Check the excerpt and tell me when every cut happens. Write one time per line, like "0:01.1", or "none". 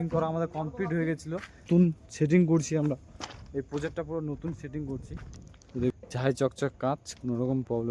0:01.7
0:05.9